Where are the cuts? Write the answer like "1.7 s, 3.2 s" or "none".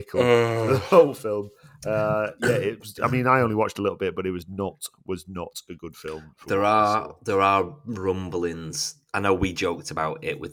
none